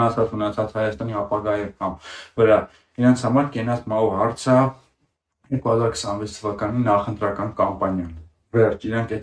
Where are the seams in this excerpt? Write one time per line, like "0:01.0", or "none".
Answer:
none